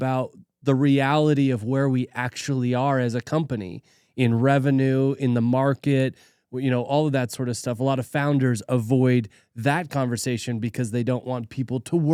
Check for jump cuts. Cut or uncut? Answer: uncut